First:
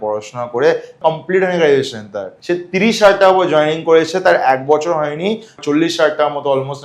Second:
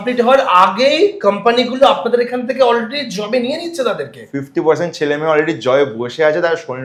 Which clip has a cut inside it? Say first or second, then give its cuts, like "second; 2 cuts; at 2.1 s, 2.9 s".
first; 3 cuts; at 0.9 s, 2.3 s, 5.5 s